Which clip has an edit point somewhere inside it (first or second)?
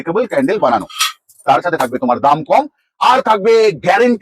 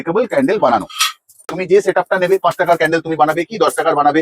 second